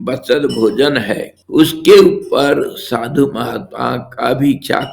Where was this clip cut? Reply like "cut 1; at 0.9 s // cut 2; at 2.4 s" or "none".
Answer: cut 1; at 1.3 s